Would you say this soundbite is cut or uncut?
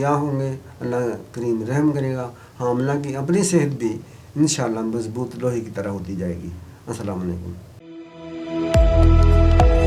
uncut